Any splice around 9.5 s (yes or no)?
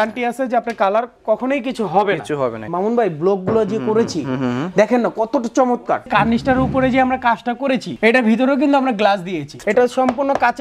yes